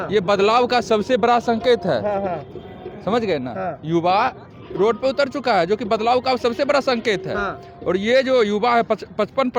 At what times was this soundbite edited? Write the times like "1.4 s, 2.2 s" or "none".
none